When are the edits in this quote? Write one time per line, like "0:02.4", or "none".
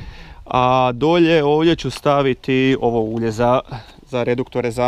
none